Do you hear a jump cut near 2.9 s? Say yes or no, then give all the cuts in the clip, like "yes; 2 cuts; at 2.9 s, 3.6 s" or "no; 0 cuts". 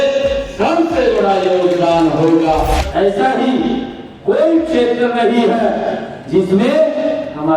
yes; 1 cut; at 2.9 s